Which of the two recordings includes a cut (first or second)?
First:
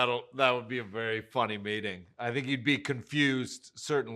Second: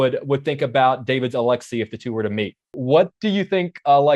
second